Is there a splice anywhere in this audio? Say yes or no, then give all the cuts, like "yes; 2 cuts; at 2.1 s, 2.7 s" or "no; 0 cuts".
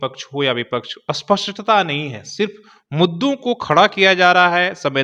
no; 0 cuts